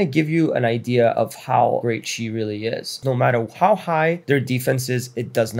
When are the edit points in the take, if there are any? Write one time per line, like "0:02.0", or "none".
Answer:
0:02.9